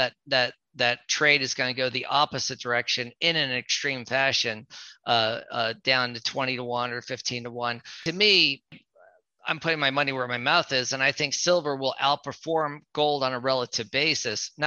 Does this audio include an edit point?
yes; 2 cuts; at 8.0 s, 8.7 s

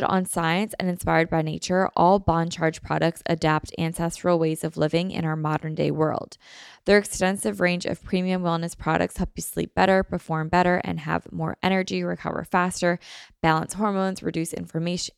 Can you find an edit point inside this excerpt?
no; 0 cuts

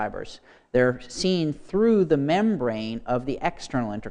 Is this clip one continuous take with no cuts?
yes; 0 cuts

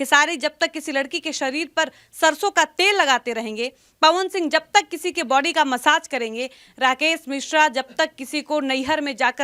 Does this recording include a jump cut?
no; 0 cuts

